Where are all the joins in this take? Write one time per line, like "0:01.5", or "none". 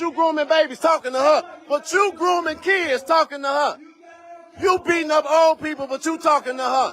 0:01.6